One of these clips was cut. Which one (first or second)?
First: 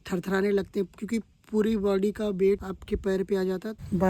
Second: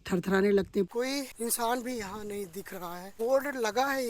second